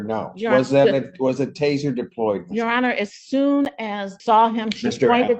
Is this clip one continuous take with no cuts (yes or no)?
no